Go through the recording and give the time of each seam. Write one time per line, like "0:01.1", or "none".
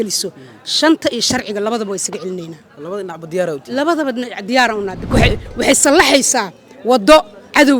0:05.1